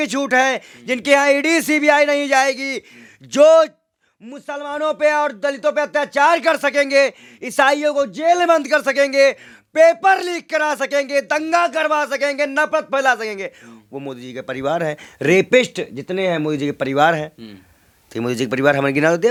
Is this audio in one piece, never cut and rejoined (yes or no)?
yes